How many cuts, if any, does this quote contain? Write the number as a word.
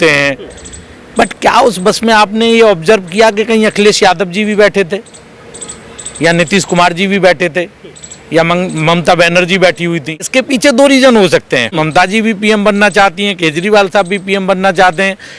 two